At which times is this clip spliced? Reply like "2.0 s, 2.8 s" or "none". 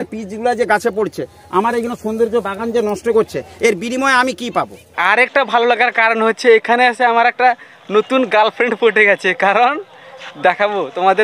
5.0 s